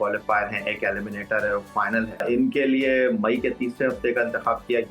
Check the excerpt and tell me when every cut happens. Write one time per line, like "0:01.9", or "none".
0:02.2